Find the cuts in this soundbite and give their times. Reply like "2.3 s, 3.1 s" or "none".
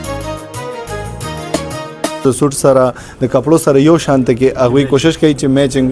2.2 s